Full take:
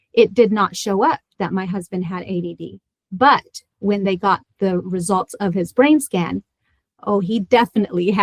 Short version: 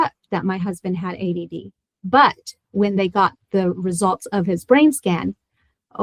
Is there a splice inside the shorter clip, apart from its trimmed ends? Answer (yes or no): no